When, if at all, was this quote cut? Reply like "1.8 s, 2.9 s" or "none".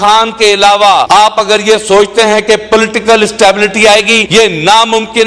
1.1 s, 4.2 s